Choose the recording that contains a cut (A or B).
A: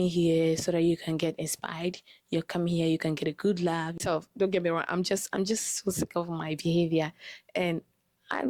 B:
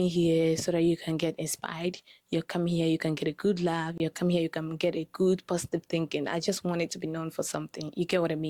A